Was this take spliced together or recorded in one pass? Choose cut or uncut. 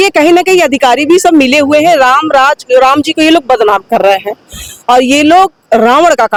uncut